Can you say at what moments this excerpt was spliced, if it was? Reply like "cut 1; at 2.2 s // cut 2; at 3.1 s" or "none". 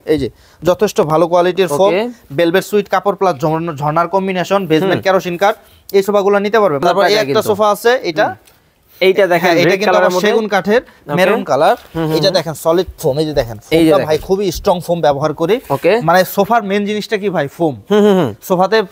cut 1; at 6.8 s